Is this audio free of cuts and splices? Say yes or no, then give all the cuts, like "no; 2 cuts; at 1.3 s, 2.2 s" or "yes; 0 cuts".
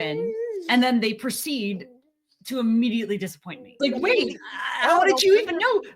no; 1 cut; at 3.7 s